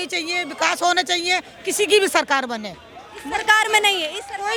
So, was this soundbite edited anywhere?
no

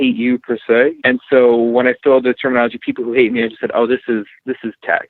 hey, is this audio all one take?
no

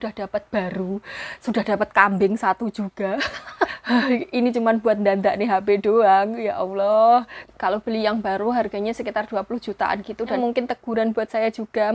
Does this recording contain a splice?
yes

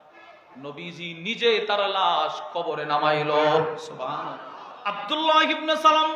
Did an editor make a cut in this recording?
yes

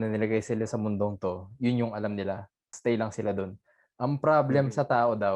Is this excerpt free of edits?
no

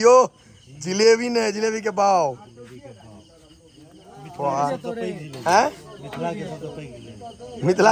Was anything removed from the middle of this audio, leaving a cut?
no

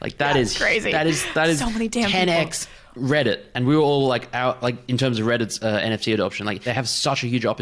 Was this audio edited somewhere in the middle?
yes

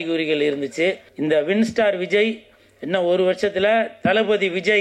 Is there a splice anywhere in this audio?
yes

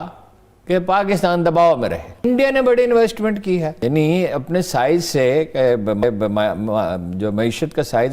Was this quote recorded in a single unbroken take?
no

